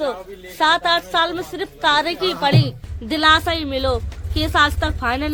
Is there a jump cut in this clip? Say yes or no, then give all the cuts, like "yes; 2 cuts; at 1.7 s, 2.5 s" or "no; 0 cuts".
no; 0 cuts